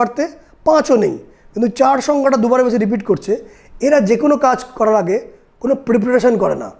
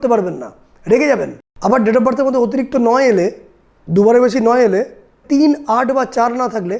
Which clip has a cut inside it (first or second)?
second